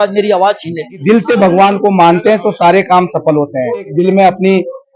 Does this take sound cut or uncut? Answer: cut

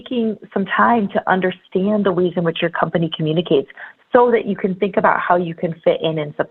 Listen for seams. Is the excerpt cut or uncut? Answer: uncut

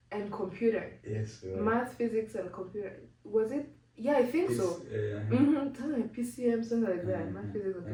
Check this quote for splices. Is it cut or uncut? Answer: uncut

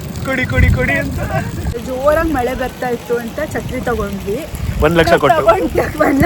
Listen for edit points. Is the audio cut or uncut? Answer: cut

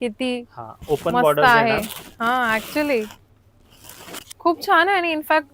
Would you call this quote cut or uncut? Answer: uncut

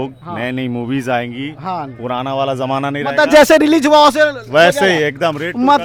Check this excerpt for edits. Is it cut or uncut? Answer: uncut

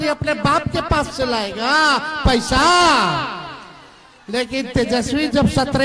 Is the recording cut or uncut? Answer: uncut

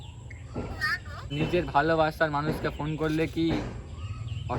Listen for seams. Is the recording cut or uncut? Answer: cut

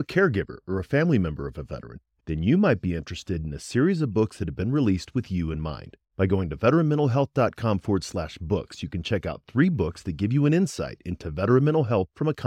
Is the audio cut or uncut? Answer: uncut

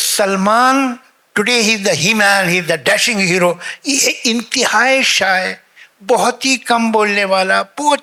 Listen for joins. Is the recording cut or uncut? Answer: uncut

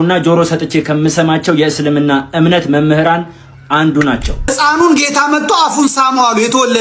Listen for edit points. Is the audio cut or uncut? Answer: cut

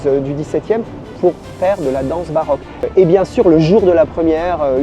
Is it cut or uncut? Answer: cut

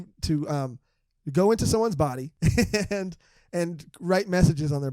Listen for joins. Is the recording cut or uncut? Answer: cut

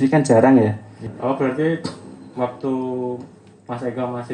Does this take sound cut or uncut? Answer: cut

